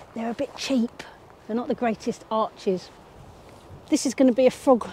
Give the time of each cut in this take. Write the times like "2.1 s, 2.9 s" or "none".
3.8 s